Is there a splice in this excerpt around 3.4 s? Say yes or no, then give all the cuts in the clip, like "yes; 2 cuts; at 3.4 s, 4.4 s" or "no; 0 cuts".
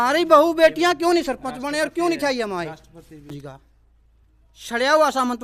yes; 1 cut; at 3.4 s